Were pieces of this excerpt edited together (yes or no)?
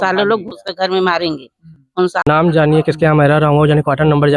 yes